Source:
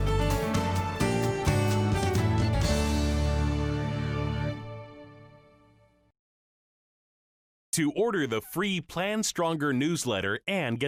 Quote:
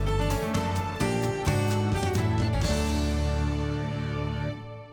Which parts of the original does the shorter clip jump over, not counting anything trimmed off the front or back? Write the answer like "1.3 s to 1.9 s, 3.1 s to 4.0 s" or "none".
none